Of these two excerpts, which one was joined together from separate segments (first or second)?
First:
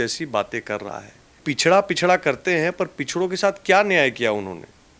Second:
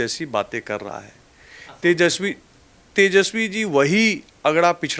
first